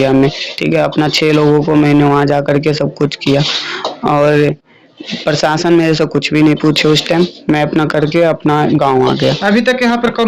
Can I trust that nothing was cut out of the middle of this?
yes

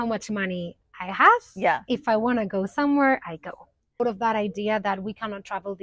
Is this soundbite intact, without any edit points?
no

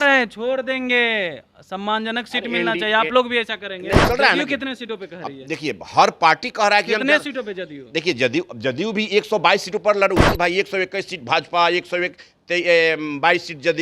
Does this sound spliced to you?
yes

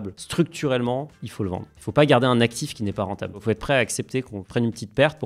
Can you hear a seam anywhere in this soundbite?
yes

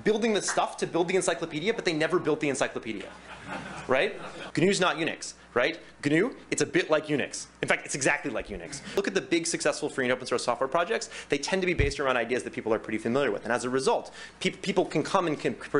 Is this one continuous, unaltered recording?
no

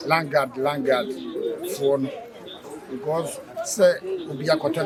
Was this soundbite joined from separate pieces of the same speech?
no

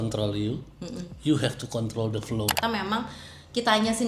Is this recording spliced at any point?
yes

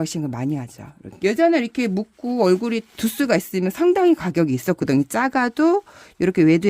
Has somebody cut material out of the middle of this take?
yes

